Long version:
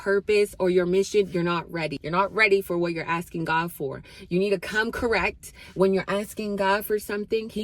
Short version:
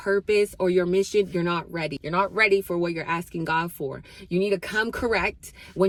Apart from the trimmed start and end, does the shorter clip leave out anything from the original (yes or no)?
no